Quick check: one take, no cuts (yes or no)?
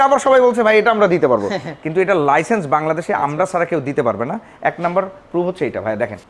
yes